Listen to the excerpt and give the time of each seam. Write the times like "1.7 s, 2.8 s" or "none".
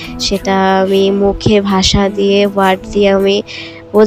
none